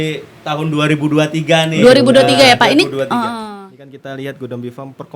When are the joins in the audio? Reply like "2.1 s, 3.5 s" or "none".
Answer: 3.5 s